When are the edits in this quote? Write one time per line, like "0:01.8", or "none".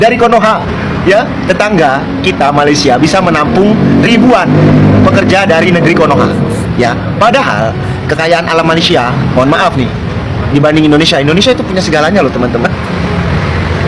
none